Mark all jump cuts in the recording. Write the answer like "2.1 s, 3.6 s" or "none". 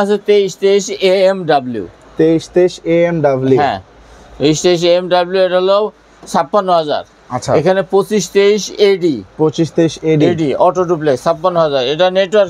none